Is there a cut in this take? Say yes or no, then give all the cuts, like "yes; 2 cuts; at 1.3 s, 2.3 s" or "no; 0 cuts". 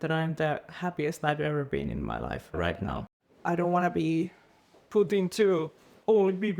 yes; 1 cut; at 3.1 s